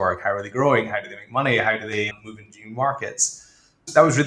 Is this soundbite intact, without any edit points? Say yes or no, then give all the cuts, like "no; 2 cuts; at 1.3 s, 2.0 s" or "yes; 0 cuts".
yes; 0 cuts